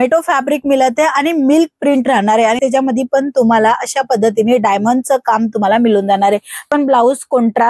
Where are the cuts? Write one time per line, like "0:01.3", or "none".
0:02.6
0:06.7